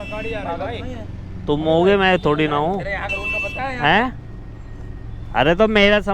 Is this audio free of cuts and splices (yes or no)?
yes